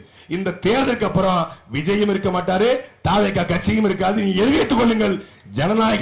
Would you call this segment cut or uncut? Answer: uncut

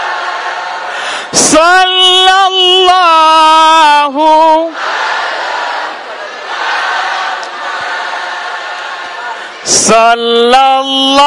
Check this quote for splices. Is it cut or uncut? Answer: uncut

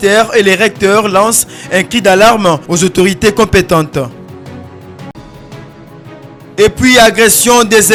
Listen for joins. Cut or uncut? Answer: uncut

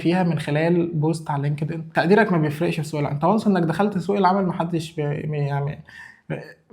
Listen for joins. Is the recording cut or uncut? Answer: cut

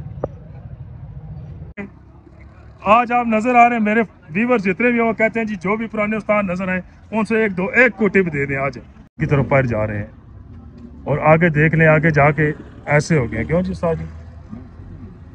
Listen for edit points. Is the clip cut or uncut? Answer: cut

